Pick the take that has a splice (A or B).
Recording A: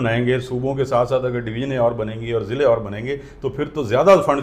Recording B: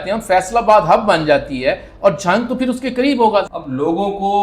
B